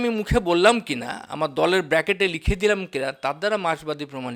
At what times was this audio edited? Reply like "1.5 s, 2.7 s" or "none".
none